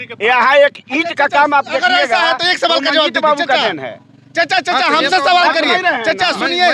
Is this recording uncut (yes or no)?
yes